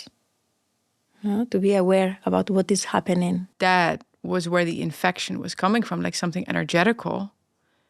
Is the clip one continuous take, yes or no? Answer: no